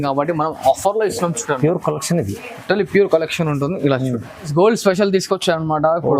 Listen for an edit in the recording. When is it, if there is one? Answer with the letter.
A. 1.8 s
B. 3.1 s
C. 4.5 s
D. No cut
C